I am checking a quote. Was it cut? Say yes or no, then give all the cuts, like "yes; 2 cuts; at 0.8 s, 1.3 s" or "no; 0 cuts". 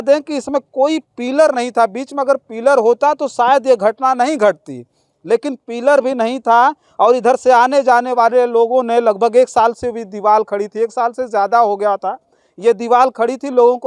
no; 0 cuts